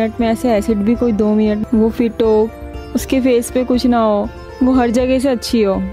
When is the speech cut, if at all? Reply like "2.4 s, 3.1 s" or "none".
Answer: 1.6 s